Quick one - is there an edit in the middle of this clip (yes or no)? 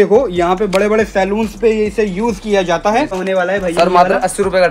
yes